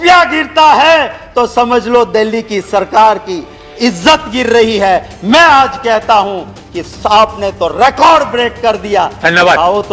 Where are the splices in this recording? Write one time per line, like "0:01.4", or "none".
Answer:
none